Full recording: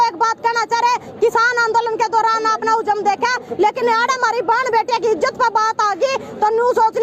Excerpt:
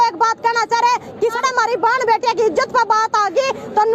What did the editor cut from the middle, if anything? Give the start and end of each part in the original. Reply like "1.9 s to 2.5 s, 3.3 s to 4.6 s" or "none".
1.4 s to 4.0 s